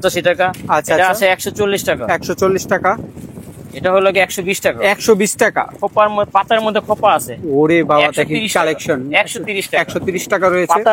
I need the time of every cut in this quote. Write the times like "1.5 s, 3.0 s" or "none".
none